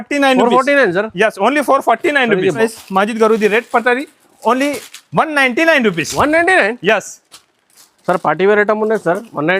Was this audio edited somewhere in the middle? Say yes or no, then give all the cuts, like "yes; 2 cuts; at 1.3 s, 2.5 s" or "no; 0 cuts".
yes; 1 cut; at 2.6 s